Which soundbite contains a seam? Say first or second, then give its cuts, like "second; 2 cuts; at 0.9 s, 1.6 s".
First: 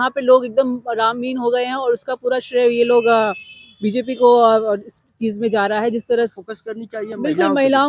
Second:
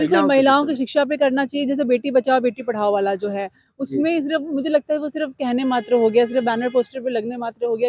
first; 1 cut; at 6.3 s